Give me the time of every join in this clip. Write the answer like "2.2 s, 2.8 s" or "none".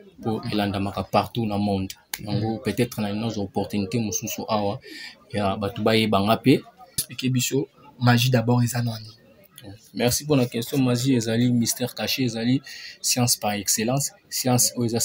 7.1 s